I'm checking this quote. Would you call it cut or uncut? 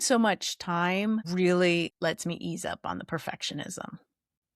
cut